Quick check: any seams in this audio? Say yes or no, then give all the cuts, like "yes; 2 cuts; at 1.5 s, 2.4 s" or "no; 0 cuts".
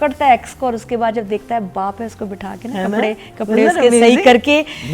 no; 0 cuts